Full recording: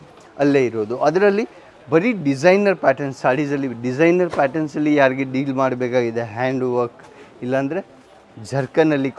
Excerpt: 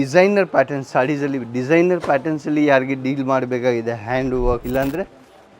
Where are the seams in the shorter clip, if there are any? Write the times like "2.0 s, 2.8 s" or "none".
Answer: 4.6 s